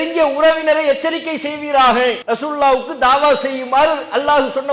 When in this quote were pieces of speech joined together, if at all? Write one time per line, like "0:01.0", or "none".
0:02.2